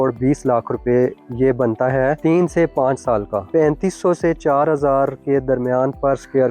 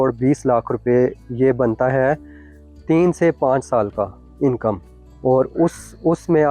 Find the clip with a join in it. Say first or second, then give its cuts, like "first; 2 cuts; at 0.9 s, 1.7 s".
first; 2 cuts; at 2.2 s, 3.5 s